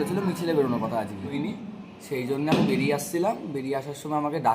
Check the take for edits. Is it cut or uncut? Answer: cut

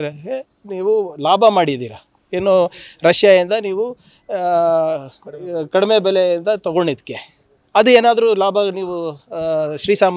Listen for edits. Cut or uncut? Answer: uncut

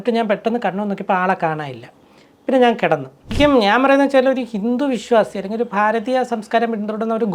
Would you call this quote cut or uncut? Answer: cut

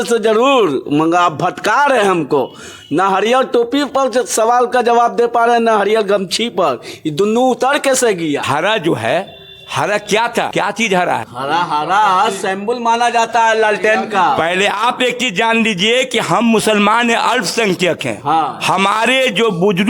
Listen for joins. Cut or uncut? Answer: uncut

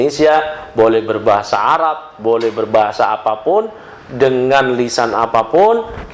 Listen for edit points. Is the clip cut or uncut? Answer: uncut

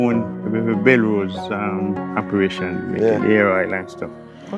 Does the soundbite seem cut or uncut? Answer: cut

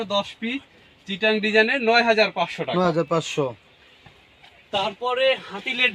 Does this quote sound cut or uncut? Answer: uncut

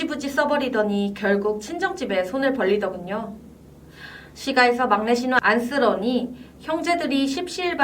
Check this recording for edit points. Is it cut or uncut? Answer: uncut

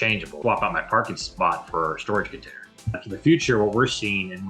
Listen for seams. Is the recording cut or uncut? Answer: cut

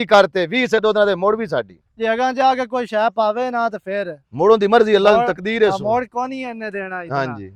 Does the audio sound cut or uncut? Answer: uncut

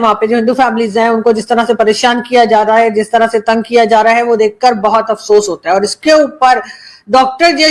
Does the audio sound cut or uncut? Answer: uncut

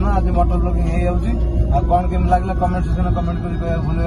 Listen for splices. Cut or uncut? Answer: uncut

